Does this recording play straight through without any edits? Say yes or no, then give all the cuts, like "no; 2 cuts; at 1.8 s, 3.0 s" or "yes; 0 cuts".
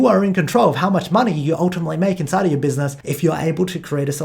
no; 1 cut; at 3.0 s